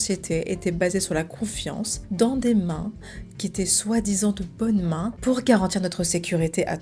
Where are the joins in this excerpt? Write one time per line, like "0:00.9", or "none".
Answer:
none